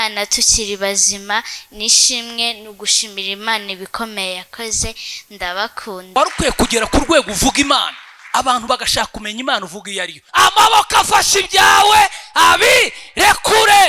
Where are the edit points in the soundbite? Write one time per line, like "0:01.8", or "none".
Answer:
0:06.2
0:10.2